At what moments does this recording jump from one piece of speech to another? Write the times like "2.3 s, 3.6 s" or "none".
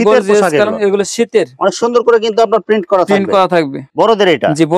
3.8 s